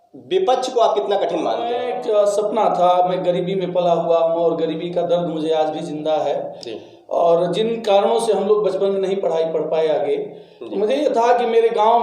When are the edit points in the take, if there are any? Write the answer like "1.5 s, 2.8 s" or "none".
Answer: 1.9 s